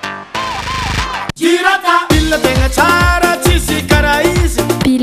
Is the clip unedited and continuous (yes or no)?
no